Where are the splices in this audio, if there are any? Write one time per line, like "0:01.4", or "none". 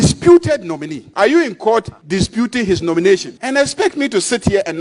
0:01.0
0:02.0
0:03.4